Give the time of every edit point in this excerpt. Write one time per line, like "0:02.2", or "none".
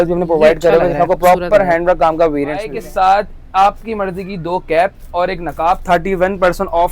0:02.8